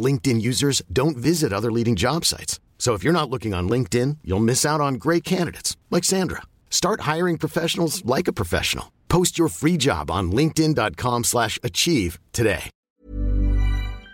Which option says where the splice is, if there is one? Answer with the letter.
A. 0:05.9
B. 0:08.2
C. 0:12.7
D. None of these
C